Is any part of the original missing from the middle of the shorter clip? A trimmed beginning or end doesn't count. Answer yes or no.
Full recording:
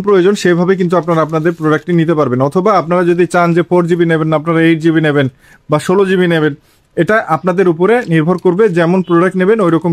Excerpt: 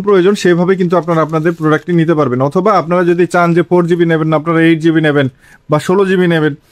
no